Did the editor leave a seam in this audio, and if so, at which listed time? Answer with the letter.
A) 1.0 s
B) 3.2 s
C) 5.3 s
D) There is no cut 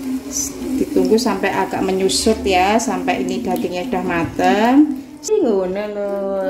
C